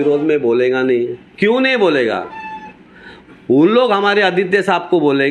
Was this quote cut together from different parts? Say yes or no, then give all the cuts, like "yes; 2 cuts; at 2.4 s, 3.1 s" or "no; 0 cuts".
no; 0 cuts